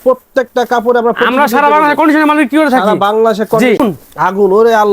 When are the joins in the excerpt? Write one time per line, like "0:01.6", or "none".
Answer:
0:03.8